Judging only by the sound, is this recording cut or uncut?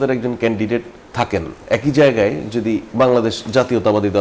cut